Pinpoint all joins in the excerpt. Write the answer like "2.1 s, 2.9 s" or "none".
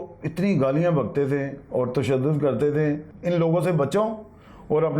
3.1 s